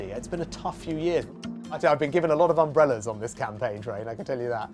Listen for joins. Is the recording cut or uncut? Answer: cut